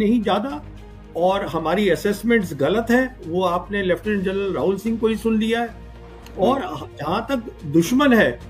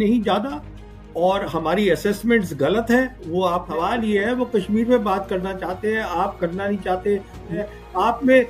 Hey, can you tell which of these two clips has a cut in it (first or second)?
second